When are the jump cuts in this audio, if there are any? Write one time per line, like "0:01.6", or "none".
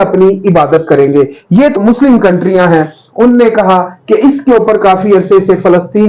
0:01.8